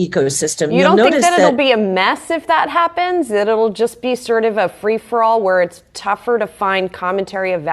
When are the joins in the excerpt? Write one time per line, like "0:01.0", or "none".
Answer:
none